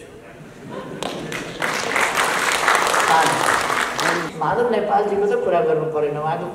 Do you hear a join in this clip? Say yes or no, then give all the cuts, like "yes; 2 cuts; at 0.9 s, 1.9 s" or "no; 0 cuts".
yes; 1 cut; at 4.3 s